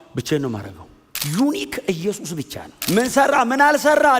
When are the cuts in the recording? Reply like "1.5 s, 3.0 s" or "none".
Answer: 1.1 s, 2.7 s